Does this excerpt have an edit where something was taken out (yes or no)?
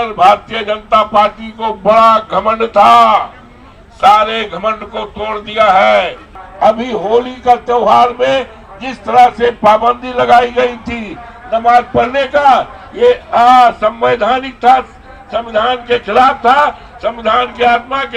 yes